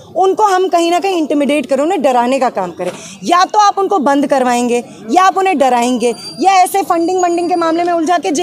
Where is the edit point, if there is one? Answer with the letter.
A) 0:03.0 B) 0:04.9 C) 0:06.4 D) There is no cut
D